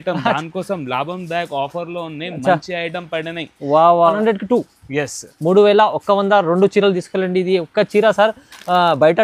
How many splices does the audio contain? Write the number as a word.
one